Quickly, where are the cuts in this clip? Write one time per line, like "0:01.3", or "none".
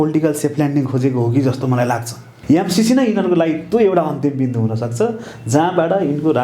0:02.3